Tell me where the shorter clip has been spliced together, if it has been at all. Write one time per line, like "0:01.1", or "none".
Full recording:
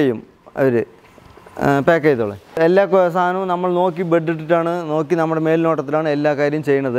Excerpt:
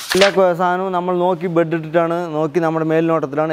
none